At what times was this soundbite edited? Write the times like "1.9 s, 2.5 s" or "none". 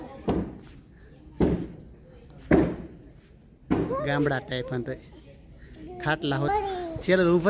6.5 s